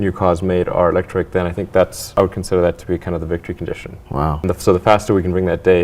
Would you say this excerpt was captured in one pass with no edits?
no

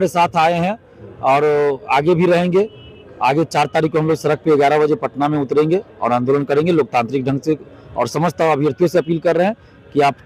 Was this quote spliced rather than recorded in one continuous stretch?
no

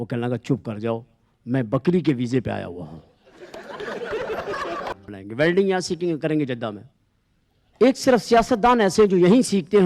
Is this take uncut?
no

